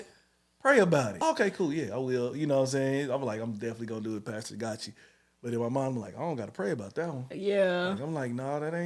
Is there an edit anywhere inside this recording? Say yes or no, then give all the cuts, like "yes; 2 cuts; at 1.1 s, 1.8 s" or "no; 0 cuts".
yes; 1 cut; at 1.1 s